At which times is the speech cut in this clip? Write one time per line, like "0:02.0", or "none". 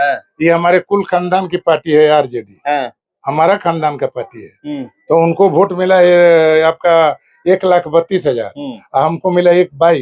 none